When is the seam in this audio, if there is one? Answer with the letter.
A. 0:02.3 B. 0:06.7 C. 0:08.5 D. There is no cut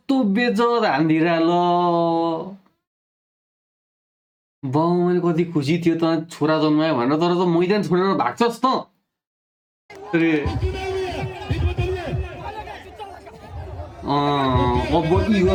D